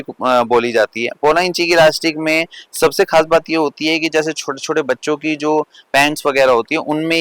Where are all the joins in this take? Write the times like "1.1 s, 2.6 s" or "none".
none